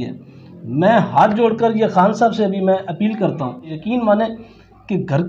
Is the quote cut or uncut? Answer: cut